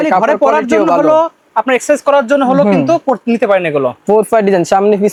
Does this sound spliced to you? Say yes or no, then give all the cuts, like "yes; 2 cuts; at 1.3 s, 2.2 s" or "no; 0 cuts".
no; 0 cuts